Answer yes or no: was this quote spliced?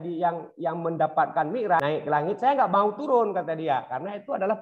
yes